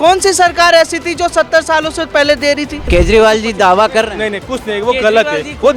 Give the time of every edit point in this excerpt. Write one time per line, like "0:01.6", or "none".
0:02.8